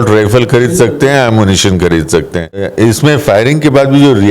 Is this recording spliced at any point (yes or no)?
yes